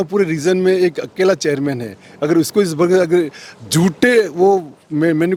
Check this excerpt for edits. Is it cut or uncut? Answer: uncut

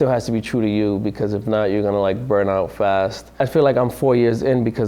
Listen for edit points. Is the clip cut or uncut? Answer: uncut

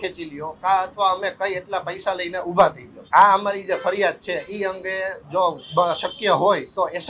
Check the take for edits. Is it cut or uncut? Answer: cut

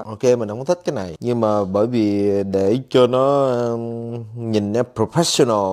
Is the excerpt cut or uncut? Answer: uncut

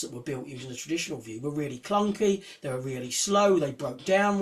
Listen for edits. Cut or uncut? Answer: uncut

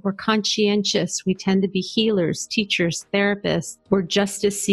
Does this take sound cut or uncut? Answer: cut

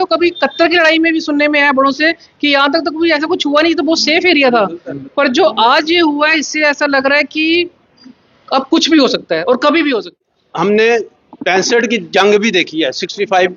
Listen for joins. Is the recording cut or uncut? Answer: cut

